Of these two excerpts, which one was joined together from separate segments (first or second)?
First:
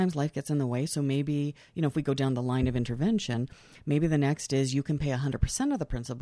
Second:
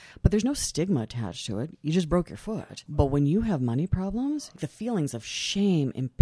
second